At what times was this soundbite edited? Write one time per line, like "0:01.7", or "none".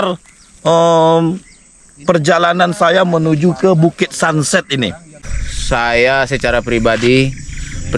0:05.2